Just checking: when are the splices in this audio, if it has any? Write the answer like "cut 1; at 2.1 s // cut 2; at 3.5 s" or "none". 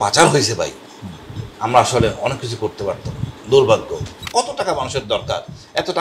cut 1; at 4.2 s